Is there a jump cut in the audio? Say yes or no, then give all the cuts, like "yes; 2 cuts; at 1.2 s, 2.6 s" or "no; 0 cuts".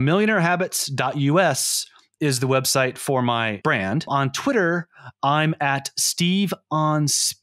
yes; 1 cut; at 3.7 s